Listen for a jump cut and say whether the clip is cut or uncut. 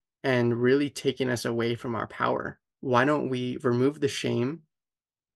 cut